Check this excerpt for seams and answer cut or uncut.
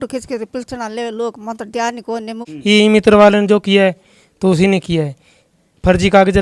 cut